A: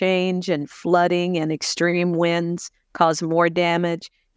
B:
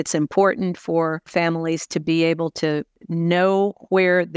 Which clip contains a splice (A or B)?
B